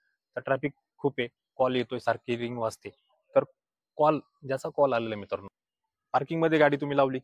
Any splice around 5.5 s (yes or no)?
yes